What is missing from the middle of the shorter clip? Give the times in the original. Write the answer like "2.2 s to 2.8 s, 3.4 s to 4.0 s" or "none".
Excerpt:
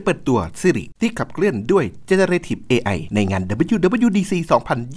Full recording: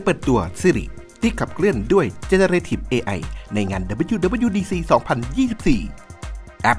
0.9 s to 1.1 s, 3.2 s to 3.4 s